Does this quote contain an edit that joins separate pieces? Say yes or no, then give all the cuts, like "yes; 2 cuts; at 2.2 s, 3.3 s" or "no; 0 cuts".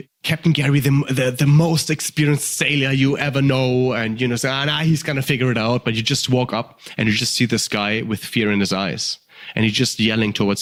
no; 0 cuts